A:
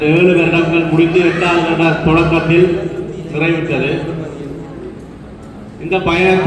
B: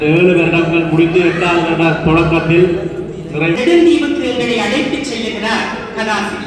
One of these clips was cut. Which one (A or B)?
B